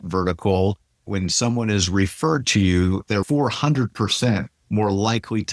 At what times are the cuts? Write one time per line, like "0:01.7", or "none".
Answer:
0:01.0
0:03.1